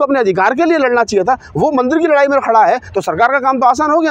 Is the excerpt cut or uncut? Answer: uncut